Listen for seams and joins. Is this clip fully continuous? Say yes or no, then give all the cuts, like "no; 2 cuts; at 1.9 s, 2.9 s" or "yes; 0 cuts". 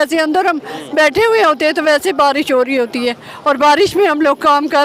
yes; 0 cuts